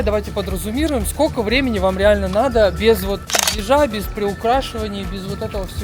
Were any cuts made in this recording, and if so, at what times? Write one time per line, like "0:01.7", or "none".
none